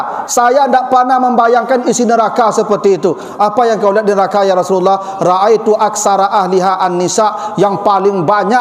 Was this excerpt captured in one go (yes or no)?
yes